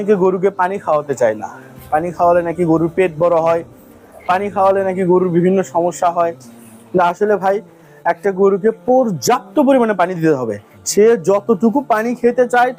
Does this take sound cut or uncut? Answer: uncut